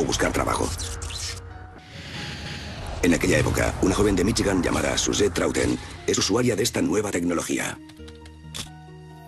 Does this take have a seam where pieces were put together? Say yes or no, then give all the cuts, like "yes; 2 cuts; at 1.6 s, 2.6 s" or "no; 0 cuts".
yes; 1 cut; at 3.0 s